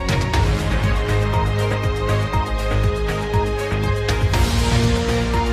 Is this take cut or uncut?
cut